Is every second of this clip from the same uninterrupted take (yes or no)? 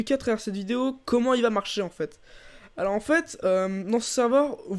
yes